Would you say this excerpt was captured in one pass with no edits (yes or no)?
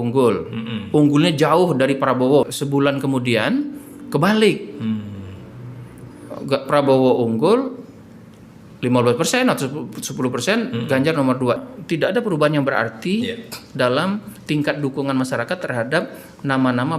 no